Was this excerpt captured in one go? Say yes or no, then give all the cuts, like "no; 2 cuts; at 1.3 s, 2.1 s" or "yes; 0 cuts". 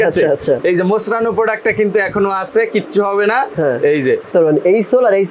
no; 1 cut; at 4.3 s